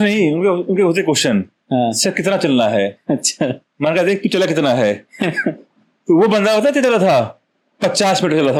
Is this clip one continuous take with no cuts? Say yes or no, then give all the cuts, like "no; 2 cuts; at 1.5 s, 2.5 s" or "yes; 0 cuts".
yes; 0 cuts